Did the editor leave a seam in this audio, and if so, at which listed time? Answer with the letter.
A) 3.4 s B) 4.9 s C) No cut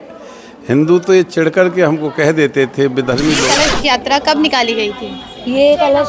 A